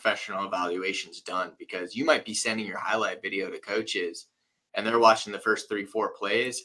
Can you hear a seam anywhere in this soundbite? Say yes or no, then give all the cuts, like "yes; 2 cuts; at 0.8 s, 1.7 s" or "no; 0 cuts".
no; 0 cuts